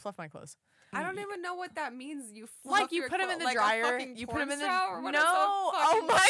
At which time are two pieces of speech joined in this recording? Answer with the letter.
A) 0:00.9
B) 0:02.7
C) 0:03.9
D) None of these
A